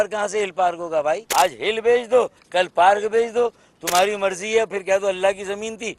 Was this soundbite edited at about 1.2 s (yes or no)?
yes